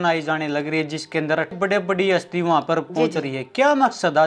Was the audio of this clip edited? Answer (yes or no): no